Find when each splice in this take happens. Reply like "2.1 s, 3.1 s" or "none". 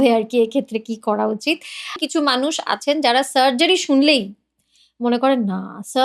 2.0 s